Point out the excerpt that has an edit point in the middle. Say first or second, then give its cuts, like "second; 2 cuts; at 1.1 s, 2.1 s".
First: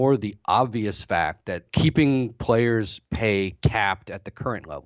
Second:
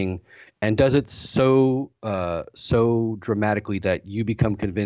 first; 1 cut; at 1.6 s